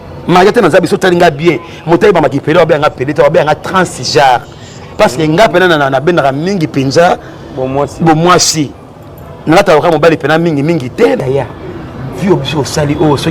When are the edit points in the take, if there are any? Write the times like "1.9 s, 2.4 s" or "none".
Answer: 5.7 s

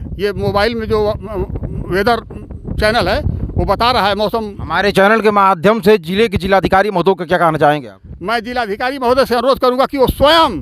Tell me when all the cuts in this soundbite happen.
none

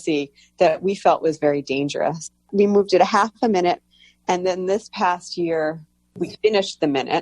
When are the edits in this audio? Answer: 2.3 s, 6.3 s

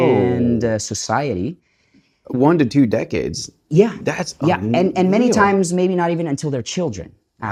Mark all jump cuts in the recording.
none

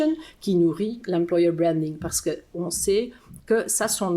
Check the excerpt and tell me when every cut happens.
2.6 s

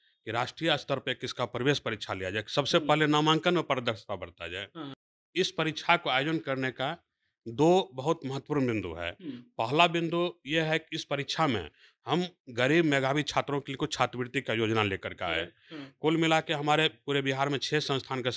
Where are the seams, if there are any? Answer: 5.0 s

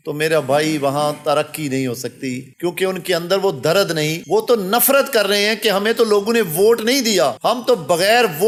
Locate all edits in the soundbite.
none

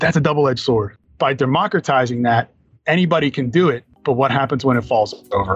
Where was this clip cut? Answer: 1.0 s, 3.9 s

